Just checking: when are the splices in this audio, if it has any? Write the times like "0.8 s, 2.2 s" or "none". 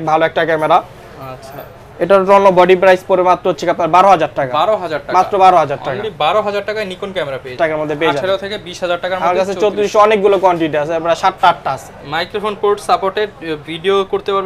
7.6 s